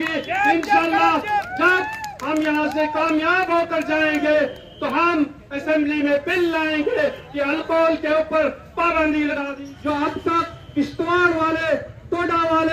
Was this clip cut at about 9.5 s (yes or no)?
yes